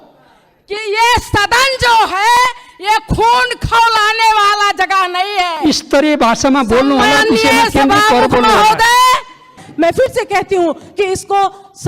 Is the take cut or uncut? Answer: cut